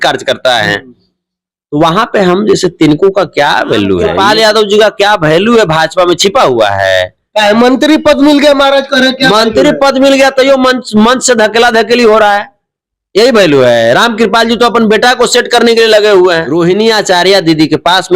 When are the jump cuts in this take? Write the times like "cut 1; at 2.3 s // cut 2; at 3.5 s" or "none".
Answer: cut 1; at 4.1 s // cut 2; at 16.5 s